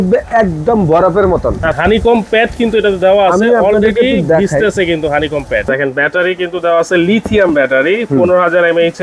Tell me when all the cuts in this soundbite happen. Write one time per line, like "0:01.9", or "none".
0:01.8
0:05.7